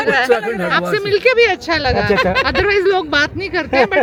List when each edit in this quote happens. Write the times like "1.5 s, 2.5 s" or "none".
none